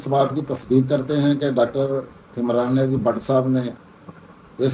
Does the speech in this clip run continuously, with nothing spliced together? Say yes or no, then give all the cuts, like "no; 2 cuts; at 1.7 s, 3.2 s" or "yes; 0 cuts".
yes; 0 cuts